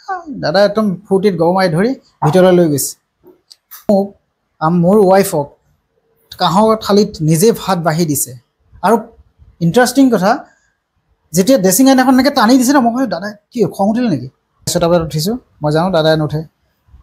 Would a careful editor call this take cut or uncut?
cut